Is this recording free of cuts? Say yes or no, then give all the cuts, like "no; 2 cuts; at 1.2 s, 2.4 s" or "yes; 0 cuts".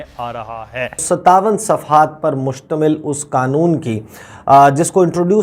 no; 1 cut; at 1.0 s